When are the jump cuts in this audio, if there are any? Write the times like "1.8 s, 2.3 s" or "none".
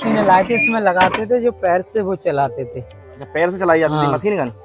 none